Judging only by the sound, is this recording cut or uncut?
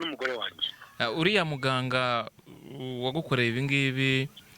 uncut